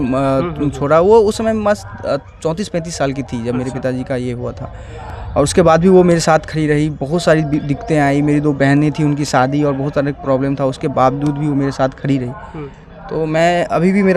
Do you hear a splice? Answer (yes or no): no